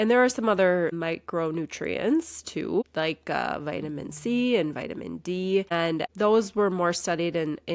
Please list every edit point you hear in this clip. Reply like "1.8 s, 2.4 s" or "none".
1.0 s, 2.8 s, 5.7 s